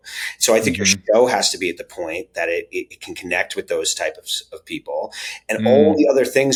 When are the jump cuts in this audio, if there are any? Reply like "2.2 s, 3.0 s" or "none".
none